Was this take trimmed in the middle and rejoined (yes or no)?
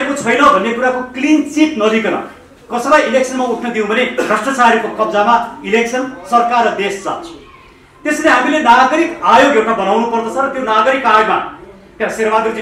no